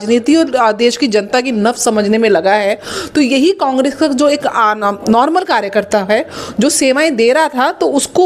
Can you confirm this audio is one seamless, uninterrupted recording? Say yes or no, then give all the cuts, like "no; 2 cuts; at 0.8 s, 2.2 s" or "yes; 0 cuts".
yes; 0 cuts